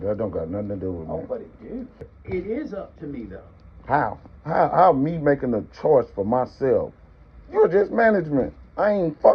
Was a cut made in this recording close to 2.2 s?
yes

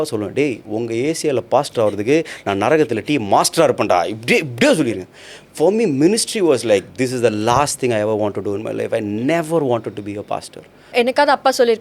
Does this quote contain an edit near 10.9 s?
yes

